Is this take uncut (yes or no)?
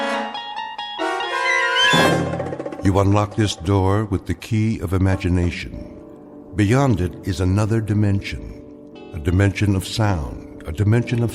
no